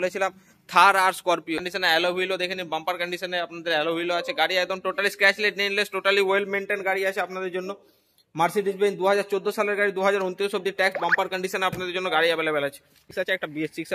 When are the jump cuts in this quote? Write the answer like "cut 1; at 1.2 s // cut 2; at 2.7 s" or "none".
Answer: cut 1; at 1.6 s // cut 2; at 13.1 s